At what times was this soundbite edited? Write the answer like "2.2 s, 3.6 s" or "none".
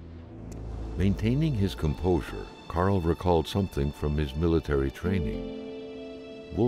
none